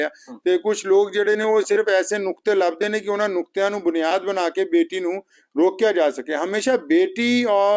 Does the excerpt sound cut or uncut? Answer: uncut